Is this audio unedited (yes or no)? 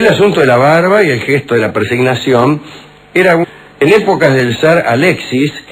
yes